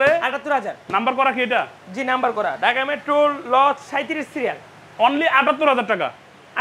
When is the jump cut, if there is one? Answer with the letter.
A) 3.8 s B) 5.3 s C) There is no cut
C